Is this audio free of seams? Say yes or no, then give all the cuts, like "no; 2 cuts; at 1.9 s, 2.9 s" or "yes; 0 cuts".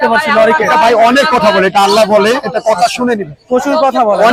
yes; 0 cuts